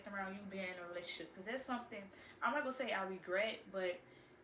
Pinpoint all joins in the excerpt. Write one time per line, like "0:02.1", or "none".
none